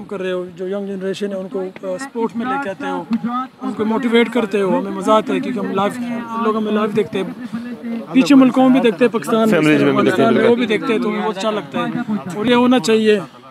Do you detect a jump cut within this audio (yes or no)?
no